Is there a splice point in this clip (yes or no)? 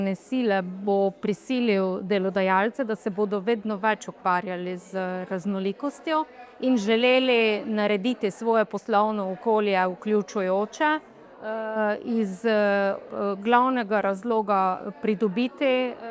no